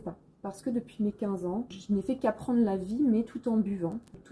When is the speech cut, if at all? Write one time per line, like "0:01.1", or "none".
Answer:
none